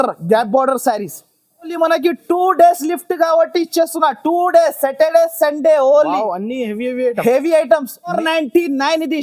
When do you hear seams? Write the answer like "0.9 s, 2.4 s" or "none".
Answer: 1.7 s, 8.1 s